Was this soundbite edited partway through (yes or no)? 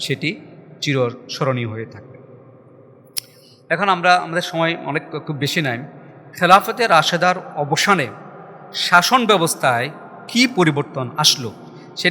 no